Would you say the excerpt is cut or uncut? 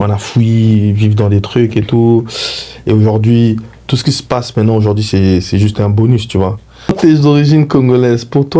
cut